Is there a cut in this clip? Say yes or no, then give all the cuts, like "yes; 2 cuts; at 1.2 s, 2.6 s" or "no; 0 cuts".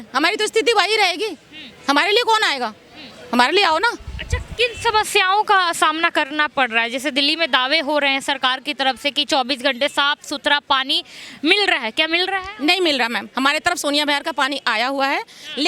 no; 0 cuts